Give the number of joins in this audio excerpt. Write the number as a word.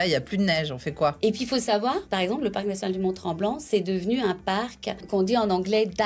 three